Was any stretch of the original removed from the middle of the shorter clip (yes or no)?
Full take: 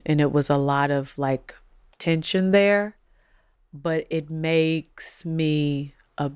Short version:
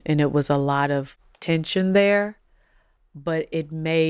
yes